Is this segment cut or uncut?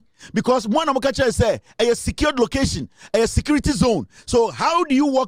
uncut